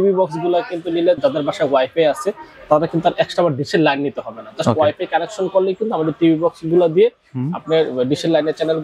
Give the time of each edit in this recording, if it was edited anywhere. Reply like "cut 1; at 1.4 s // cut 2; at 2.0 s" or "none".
cut 1; at 1.2 s